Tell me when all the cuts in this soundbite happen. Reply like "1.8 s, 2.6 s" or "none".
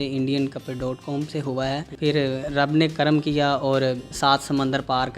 1.9 s, 4.1 s